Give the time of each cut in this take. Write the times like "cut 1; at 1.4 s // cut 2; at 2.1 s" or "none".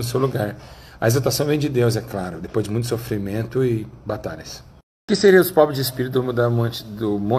none